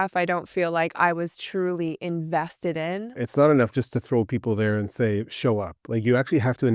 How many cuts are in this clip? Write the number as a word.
one